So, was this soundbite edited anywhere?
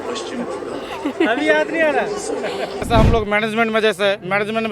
yes; 1 cut; at 2.9 s

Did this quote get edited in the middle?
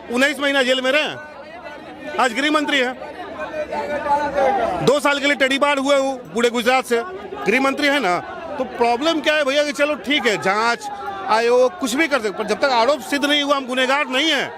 no; 0 cuts

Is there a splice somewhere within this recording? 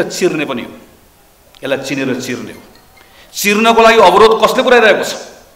no; 0 cuts

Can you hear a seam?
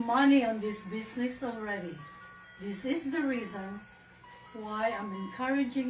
no; 0 cuts

